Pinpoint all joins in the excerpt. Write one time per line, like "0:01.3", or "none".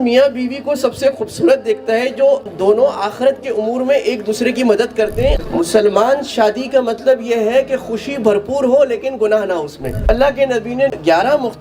0:05.4
0:10.1